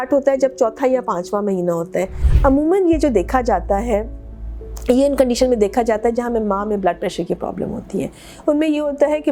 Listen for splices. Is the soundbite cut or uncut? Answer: cut